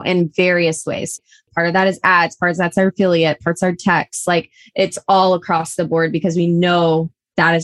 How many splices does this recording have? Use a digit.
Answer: 1